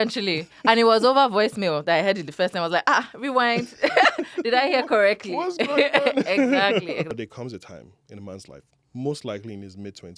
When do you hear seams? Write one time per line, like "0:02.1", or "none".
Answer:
0:07.2